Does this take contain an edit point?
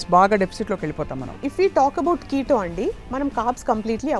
yes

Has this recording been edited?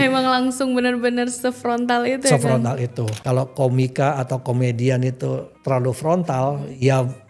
yes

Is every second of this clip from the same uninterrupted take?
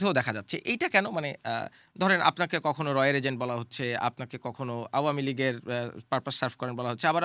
yes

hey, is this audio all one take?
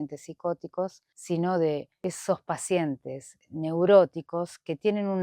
no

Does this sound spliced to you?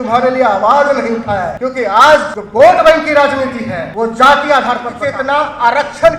yes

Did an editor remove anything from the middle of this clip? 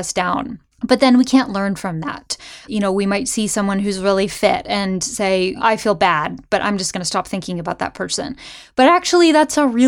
yes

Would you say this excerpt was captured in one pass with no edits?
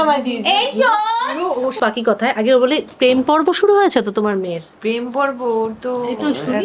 no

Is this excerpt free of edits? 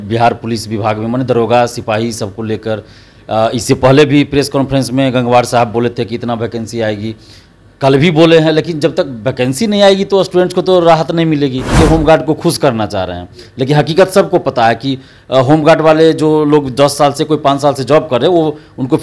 no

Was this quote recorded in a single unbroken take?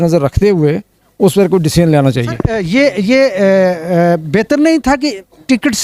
yes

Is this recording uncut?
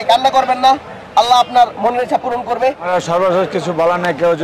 no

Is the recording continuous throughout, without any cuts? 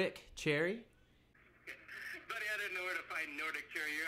no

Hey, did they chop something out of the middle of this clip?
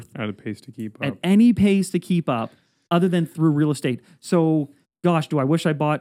no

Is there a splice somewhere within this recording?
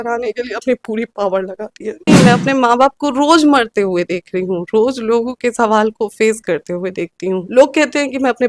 yes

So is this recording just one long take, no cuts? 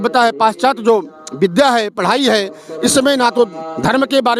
yes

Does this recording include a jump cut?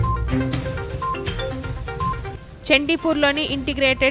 no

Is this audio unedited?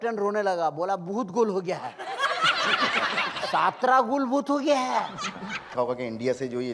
no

